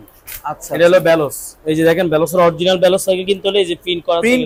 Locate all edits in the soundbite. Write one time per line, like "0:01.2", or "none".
none